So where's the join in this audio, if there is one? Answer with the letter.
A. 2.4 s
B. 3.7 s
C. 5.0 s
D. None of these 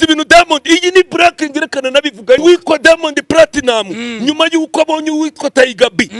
A